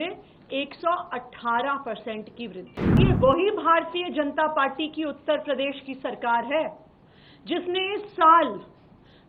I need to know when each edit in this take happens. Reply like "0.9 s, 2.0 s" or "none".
3.0 s